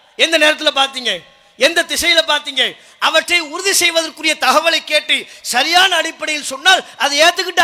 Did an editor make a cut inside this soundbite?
no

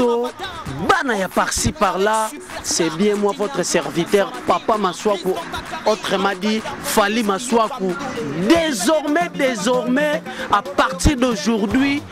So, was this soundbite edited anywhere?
no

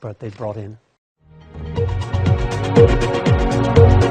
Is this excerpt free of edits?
no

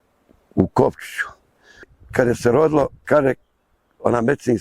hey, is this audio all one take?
no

